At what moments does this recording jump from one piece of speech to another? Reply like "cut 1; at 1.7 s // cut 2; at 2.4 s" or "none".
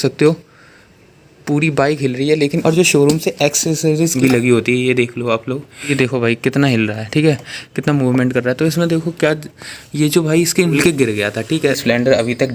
cut 1; at 2.6 s // cut 2; at 4.1 s // cut 3; at 5.9 s // cut 4; at 10.8 s // cut 5; at 11.8 s